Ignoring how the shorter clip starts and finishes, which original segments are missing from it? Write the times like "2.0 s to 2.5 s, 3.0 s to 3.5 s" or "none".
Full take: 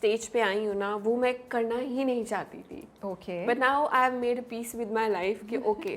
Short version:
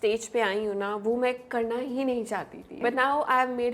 2.8 s to 3.4 s